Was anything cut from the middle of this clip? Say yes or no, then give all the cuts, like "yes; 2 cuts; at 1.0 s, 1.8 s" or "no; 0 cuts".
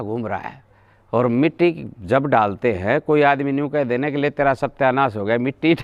no; 0 cuts